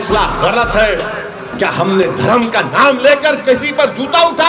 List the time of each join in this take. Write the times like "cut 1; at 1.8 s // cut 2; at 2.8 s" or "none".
none